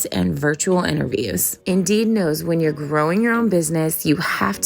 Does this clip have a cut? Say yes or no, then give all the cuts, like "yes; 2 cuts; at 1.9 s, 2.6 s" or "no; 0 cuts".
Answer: yes; 1 cut; at 1.5 s